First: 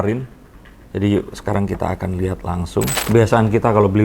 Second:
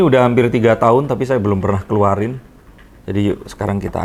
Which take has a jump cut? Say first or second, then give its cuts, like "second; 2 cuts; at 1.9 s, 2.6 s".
first; 1 cut; at 3.0 s